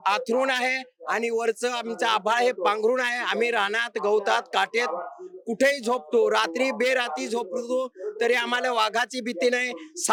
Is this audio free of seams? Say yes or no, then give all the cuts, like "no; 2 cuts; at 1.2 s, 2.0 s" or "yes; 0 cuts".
yes; 0 cuts